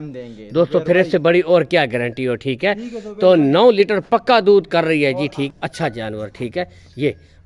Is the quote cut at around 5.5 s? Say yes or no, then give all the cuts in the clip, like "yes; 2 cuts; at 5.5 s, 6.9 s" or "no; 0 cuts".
yes; 1 cut; at 5.5 s